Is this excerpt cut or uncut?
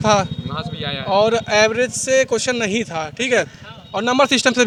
uncut